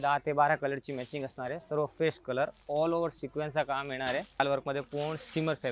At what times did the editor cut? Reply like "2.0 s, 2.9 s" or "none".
4.4 s